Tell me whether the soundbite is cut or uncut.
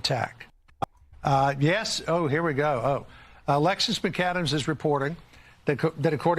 cut